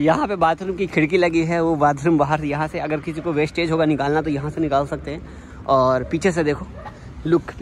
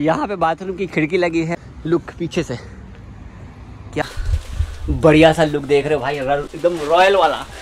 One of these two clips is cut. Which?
second; 2 cuts; at 1.5 s, 4.0 s

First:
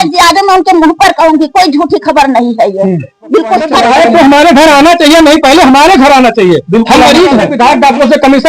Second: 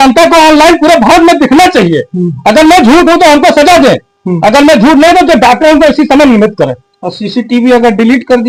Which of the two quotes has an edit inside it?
first; 2 cuts; at 3.8 s, 7.5 s

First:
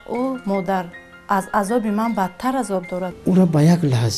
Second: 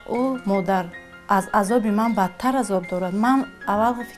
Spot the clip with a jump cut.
first; 1 cut; at 3.1 s

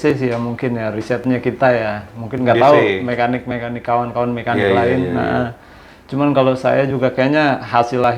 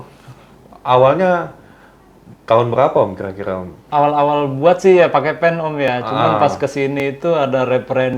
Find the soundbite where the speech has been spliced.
second; 1 cut; at 3.7 s

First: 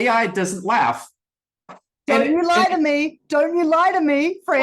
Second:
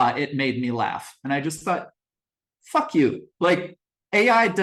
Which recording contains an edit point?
first; 1 cut; at 1.7 s

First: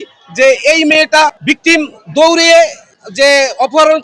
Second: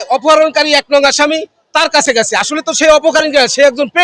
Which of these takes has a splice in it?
first; 1 cut; at 1.4 s

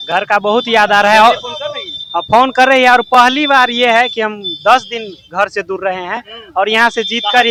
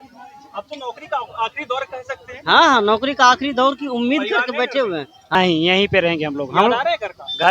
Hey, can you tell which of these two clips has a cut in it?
second; 1 cut; at 5.3 s

